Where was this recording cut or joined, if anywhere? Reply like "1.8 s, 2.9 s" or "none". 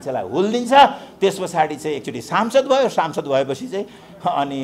none